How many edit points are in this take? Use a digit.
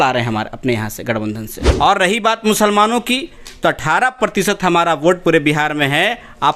1